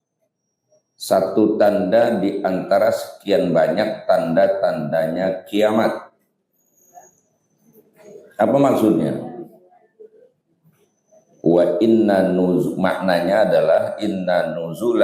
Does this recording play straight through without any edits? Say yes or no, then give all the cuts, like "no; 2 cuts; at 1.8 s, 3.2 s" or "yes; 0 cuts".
yes; 0 cuts